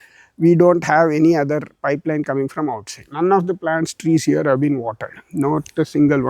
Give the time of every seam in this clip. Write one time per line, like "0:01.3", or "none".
0:02.9